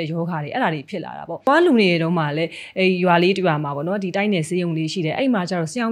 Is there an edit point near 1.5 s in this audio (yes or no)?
yes